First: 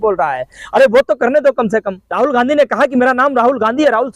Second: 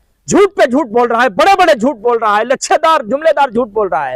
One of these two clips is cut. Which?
first; 1 cut; at 2.0 s

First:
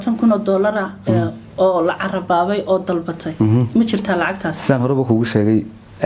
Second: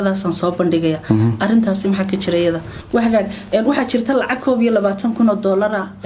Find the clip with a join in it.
second; 1 cut; at 2.7 s

